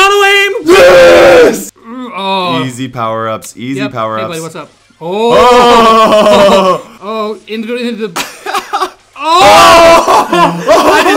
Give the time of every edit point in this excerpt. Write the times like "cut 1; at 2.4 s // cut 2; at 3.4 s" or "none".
cut 1; at 1.6 s // cut 2; at 6.9 s

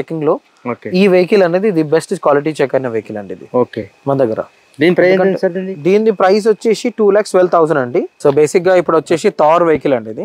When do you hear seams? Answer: cut 1; at 8.1 s

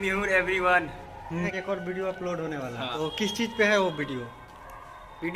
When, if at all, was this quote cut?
cut 1; at 1.5 s // cut 2; at 2.9 s

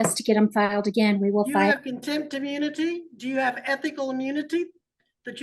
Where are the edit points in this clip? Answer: none

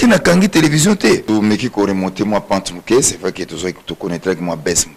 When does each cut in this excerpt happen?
cut 1; at 1.2 s

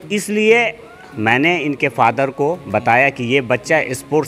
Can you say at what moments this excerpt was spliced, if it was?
none

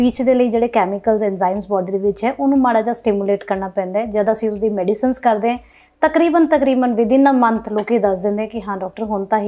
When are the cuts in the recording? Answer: none

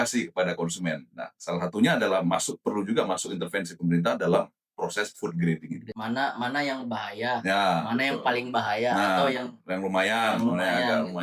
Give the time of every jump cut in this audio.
cut 1; at 5.9 s

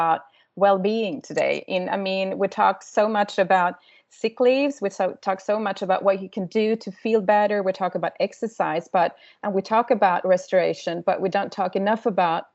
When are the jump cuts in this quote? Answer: none

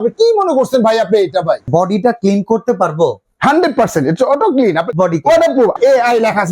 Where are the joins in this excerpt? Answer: cut 1; at 1.7 s // cut 2; at 4.9 s // cut 3; at 5.7 s

